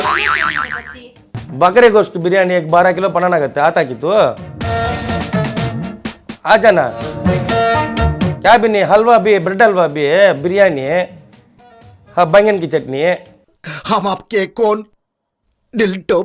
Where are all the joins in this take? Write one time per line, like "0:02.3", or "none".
0:01.4